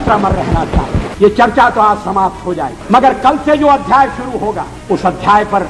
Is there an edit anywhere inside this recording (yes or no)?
yes